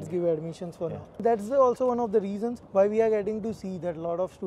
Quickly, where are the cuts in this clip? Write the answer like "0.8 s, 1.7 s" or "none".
1.2 s, 2.6 s